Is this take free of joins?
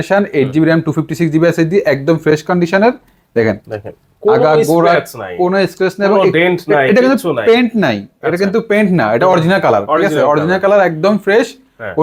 yes; 0 cuts

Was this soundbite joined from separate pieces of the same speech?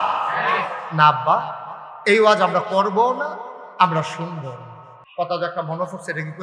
yes; 1 cut; at 5.0 s

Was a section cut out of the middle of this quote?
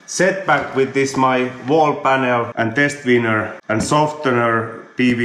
yes; 1 cut; at 2.5 s

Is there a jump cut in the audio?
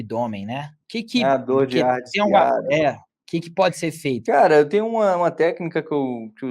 yes; 2 cuts; at 3.1 s, 4.2 s

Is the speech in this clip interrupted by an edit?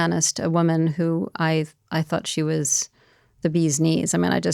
no; 0 cuts

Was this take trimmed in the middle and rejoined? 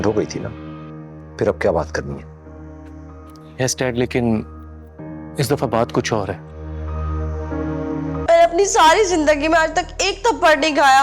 yes; 1 cut; at 8.2 s

